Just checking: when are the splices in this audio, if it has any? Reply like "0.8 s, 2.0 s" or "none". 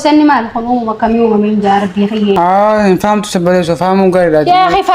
2.4 s